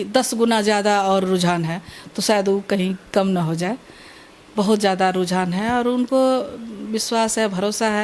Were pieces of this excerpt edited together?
no; 0 cuts

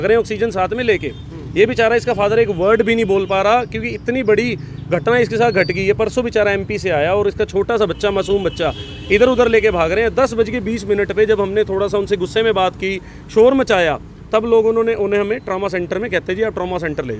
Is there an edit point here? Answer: no; 0 cuts

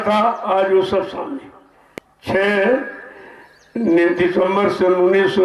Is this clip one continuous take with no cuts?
yes; 0 cuts

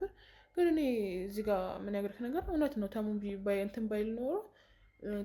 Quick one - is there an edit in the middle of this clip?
no; 0 cuts

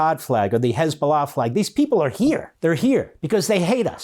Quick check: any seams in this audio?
yes; 2 cuts; at 2.5 s, 3.2 s

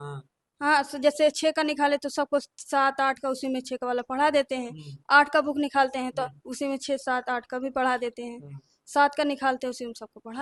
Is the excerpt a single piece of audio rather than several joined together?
yes; 0 cuts

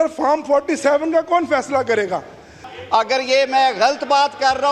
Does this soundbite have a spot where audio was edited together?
yes; 1 cut; at 2.6 s

